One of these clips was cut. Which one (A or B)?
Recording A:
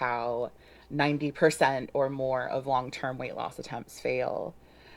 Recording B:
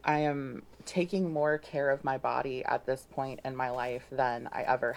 A